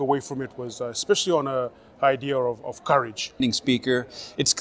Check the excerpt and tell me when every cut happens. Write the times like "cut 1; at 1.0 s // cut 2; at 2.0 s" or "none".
cut 1; at 3.4 s

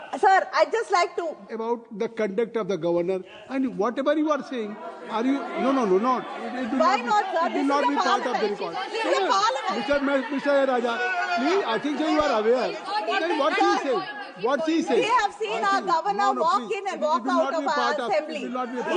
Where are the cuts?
cut 1; at 1.5 s

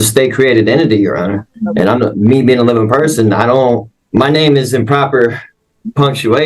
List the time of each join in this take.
cut 1; at 1.5 s // cut 2; at 3.9 s

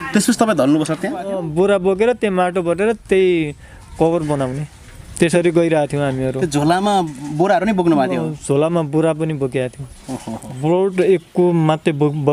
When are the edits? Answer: cut 1; at 1.4 s // cut 2; at 10.4 s

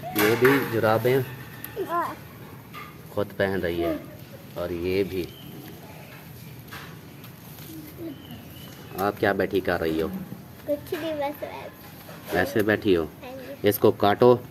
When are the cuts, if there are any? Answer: none

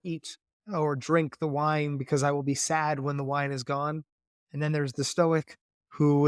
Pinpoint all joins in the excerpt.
none

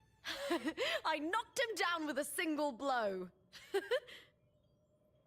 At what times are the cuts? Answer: cut 1; at 4.3 s

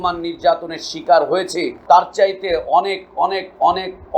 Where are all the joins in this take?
cut 1; at 1.7 s

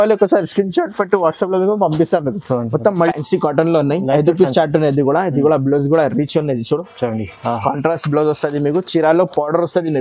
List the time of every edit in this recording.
cut 1; at 3.1 s

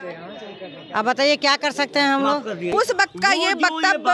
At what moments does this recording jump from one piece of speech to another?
cut 1; at 2.7 s

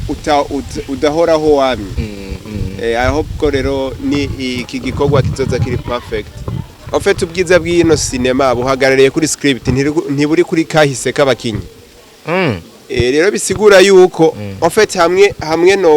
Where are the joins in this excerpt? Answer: cut 1; at 6.7 s

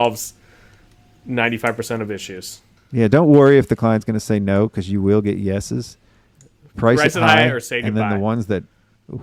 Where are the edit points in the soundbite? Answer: none

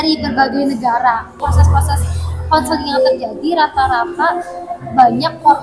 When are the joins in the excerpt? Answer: cut 1; at 1.4 s

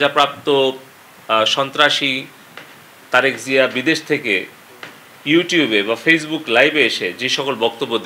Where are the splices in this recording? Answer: none

